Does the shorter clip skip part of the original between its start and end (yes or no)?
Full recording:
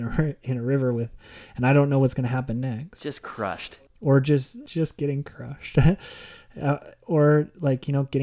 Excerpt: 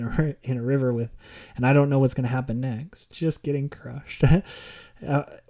yes